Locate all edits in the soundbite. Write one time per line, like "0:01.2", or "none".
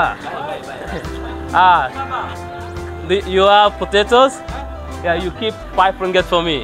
none